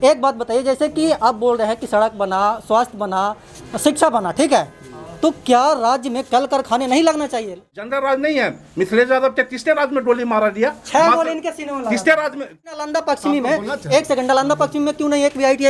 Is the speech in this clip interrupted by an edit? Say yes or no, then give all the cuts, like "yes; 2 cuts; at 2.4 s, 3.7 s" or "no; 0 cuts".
yes; 2 cuts; at 7.6 s, 12.8 s